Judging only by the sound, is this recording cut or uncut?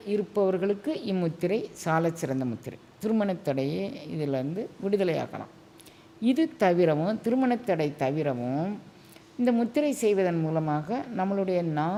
uncut